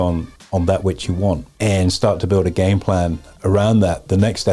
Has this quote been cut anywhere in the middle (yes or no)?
yes